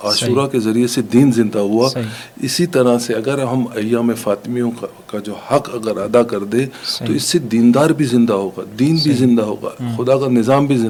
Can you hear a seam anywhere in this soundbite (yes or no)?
no